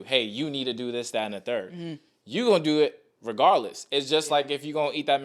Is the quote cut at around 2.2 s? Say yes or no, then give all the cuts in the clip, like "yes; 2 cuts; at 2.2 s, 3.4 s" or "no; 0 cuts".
no; 0 cuts